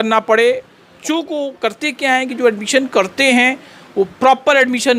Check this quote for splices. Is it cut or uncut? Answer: cut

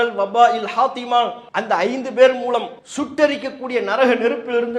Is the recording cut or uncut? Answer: cut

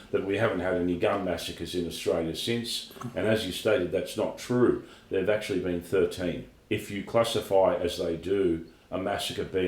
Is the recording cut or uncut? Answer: cut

